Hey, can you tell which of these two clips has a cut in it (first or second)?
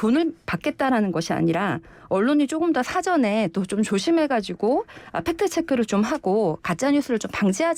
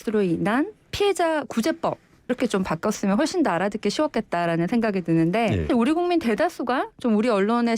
second